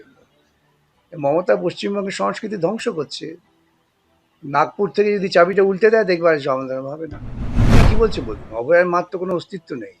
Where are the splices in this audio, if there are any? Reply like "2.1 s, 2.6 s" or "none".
7.6 s